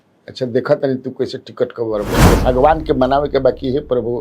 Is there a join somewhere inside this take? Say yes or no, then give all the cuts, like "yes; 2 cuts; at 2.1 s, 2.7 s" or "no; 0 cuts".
yes; 1 cut; at 2.2 s